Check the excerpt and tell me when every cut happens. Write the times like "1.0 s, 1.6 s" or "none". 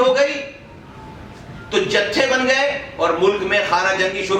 none